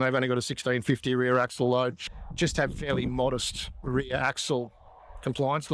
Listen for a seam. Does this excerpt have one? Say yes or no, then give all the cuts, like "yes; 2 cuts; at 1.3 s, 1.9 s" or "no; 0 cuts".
yes; 1 cut; at 2.3 s